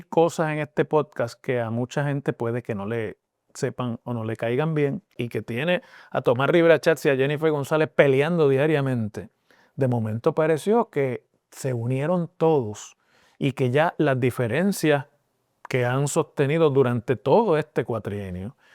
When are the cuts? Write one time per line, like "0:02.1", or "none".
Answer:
0:05.3